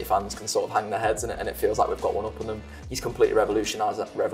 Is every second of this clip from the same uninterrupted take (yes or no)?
yes